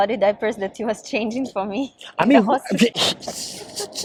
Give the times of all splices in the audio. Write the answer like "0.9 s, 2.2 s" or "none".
none